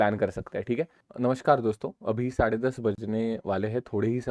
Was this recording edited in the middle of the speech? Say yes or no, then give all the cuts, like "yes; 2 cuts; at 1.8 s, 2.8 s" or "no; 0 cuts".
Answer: no; 0 cuts